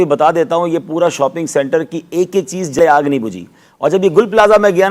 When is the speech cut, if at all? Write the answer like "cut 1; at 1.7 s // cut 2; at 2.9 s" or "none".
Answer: cut 1; at 2.8 s